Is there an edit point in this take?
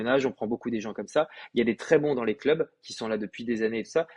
no; 0 cuts

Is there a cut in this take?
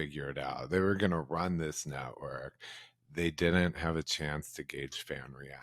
no; 0 cuts

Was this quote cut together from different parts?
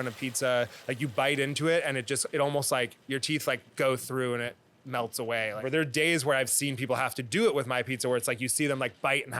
yes; 1 cut; at 5.7 s

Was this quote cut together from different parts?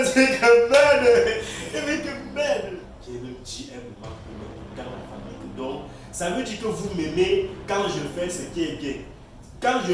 yes; 1 cut; at 2.9 s

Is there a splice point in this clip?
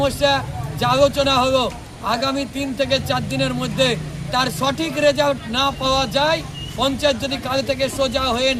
no; 0 cuts

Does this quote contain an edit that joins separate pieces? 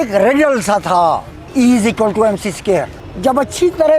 yes; 2 cuts; at 1.4 s, 3.0 s

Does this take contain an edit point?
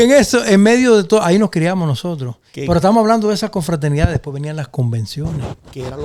no; 0 cuts

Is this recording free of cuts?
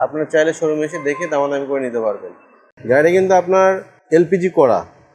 no; 2 cuts; at 2.6 s, 3.9 s

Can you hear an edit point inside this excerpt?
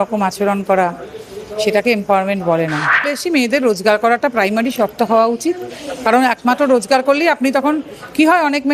yes; 1 cut; at 3.1 s

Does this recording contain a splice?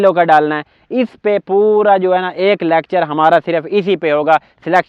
no; 0 cuts

